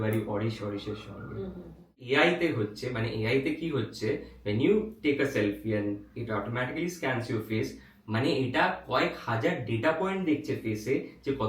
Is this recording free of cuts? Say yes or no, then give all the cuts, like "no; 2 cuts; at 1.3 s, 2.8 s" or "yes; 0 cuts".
no; 1 cut; at 2.0 s